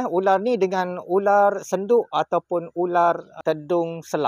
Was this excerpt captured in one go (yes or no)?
no